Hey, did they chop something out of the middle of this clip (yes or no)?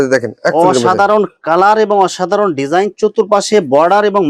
no